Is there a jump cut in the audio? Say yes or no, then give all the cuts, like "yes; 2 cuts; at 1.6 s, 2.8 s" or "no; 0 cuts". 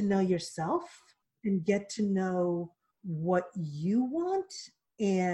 yes; 1 cut; at 1.2 s